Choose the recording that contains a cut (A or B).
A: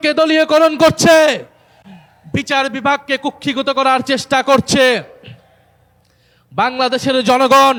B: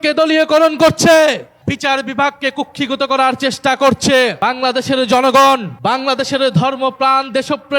B